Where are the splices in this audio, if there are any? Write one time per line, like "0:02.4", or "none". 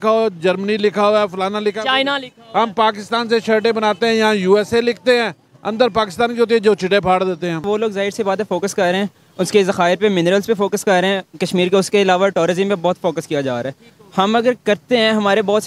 0:07.6